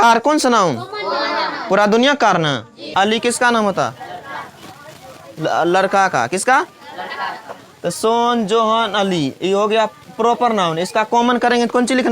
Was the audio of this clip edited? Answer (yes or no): yes